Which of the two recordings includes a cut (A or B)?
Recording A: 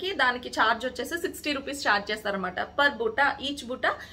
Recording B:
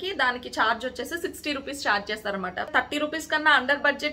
B